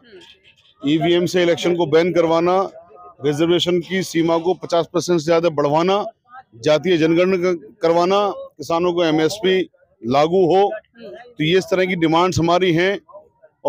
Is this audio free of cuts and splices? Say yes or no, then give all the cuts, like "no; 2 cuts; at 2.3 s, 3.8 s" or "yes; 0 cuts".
yes; 0 cuts